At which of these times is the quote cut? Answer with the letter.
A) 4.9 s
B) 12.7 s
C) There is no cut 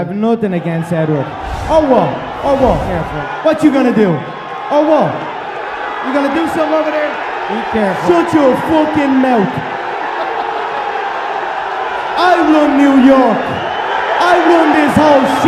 B